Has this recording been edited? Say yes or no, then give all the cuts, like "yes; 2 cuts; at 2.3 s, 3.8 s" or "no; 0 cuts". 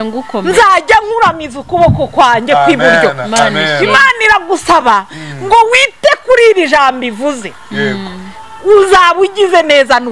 no; 0 cuts